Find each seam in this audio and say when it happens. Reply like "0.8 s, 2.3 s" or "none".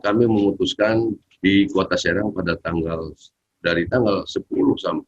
1.3 s

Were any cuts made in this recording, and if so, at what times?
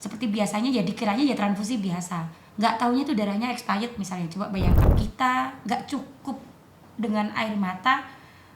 4.8 s

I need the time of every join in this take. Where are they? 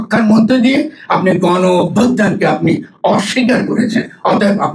none

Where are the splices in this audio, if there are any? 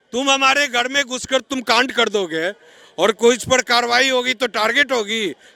none

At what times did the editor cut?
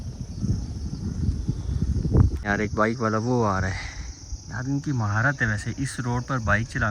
2.5 s

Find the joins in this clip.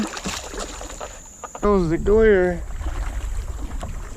1.6 s

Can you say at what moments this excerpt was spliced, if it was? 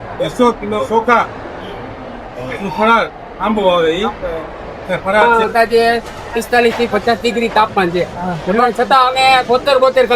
5.2 s

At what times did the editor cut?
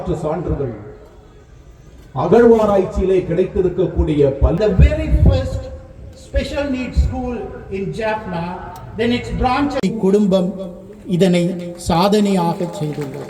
4.6 s, 9.8 s

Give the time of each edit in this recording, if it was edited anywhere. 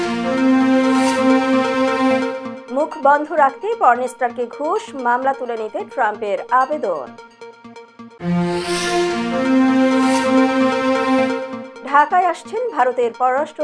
none

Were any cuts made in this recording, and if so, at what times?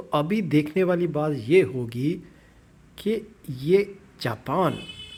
none

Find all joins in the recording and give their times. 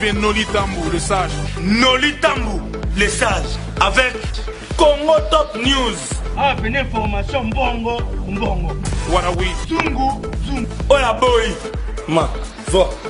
none

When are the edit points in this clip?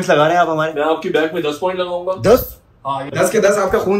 none

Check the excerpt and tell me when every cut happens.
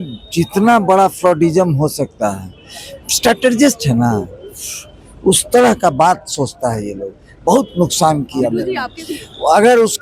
8.7 s

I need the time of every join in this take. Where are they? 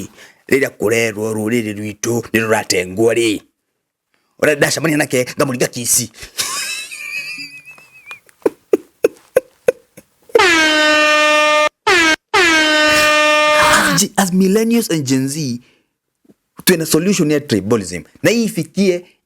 13.9 s

